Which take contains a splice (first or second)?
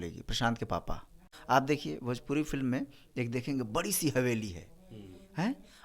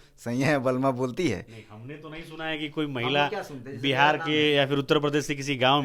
first